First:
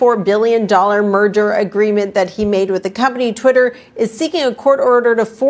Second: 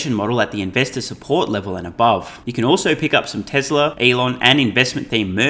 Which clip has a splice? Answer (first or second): second